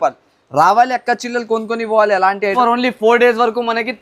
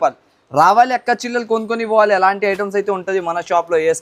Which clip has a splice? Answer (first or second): first